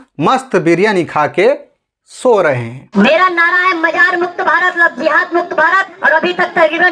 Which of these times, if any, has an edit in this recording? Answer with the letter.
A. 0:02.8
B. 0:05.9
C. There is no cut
A